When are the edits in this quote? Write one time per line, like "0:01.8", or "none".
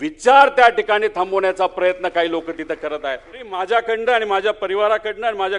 0:03.5